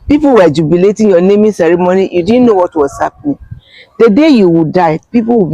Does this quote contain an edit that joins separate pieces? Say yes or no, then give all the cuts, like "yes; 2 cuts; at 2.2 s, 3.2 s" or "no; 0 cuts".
no; 0 cuts